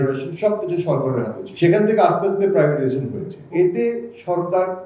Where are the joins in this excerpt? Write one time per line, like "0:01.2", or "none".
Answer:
0:01.4
0:03.5